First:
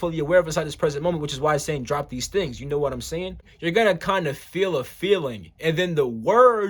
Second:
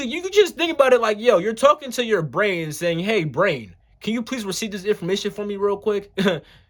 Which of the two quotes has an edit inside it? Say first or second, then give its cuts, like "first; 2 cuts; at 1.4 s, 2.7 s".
first; 1 cut; at 3.5 s